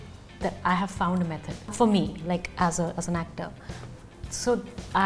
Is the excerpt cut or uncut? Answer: cut